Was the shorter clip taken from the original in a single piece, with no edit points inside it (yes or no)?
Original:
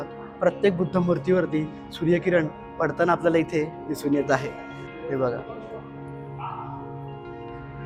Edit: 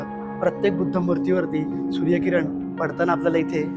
yes